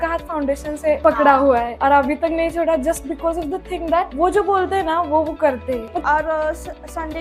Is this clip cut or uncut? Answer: cut